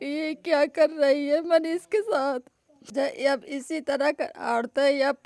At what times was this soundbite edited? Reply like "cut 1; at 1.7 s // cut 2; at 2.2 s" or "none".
cut 1; at 2.9 s